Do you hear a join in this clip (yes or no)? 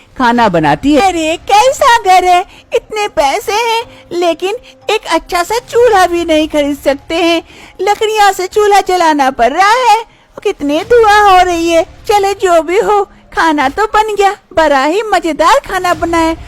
no